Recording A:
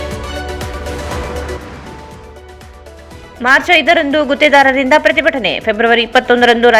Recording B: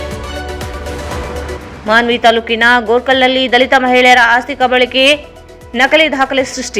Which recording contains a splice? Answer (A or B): B